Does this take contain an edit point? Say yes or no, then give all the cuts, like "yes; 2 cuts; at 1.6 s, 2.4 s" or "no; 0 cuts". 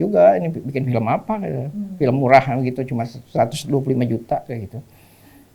no; 0 cuts